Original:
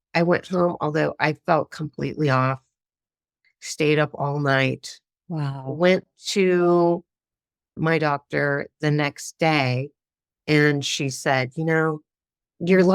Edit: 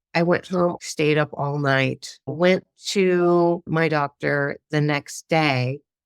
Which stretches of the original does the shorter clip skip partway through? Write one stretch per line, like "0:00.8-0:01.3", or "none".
0:00.8-0:03.6
0:05.0-0:05.6
0:07.0-0:07.7